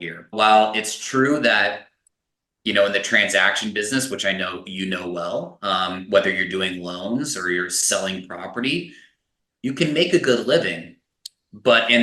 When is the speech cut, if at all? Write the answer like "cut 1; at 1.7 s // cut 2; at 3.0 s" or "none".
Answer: none